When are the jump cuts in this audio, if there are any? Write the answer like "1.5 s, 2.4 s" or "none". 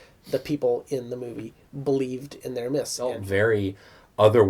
3.2 s

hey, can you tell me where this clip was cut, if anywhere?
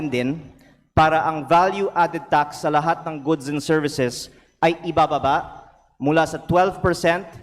none

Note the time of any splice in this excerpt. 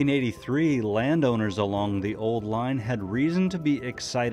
1.4 s

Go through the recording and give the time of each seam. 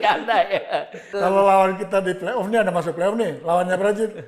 1.1 s

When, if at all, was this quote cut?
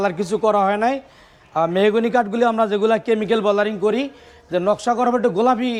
none

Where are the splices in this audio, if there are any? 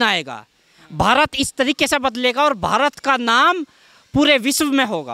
none

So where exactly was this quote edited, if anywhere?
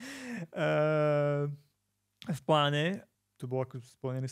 3.1 s

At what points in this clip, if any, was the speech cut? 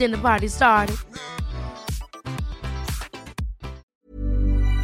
3.8 s

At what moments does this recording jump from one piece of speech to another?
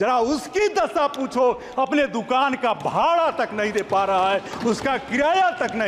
none

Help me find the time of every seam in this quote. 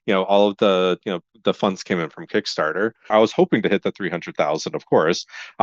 3.1 s

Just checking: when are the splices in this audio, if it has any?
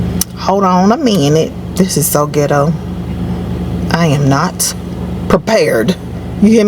none

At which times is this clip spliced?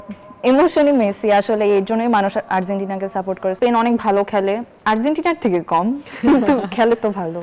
3.6 s, 4.7 s

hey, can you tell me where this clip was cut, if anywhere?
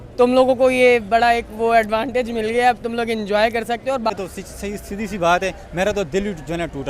4.1 s

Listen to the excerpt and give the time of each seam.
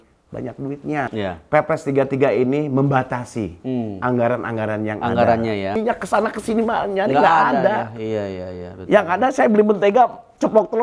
1.1 s, 5.8 s

